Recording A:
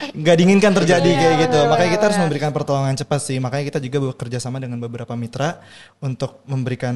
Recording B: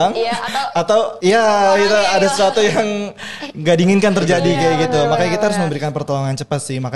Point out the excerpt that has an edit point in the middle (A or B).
B